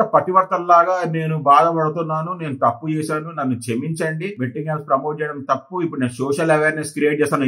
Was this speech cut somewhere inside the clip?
no; 0 cuts

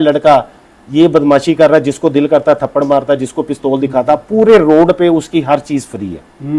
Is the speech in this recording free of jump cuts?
yes; 0 cuts

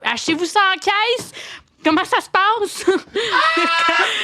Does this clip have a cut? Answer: yes; 1 cut; at 3.1 s

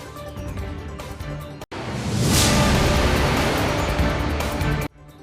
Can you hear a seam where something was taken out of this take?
yes; 1 cut; at 1.3 s

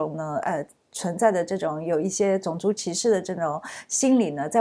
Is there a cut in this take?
no; 0 cuts

